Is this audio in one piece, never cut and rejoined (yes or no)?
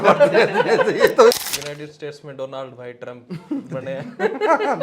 no